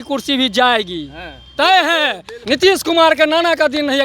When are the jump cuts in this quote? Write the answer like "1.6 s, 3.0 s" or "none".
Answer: 2.3 s